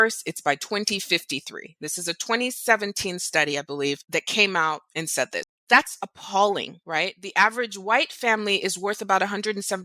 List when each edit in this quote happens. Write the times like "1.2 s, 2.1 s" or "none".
4.0 s, 5.4 s, 6.8 s